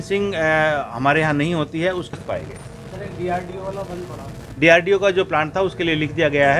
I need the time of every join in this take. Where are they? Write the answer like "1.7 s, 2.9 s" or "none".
2.2 s